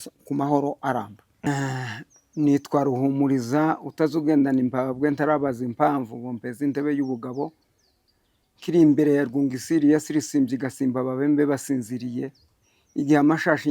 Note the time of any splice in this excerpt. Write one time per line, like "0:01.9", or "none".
0:01.2